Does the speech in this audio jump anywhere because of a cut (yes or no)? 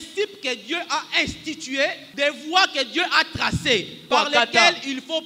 yes